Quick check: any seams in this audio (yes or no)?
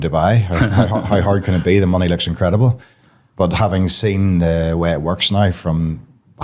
no